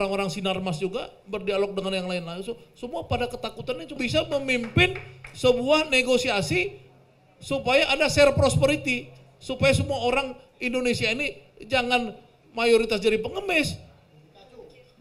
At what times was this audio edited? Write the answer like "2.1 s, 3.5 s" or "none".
3.9 s